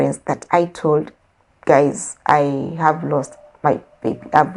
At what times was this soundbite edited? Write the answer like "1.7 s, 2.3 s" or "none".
none